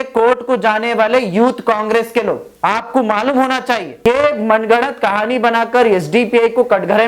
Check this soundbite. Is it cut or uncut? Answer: cut